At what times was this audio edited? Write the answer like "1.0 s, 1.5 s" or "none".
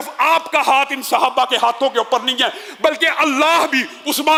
none